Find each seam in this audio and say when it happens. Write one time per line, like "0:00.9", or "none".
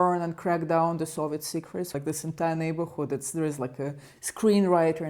0:01.9